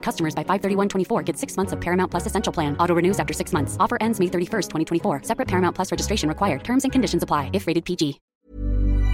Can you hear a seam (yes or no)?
yes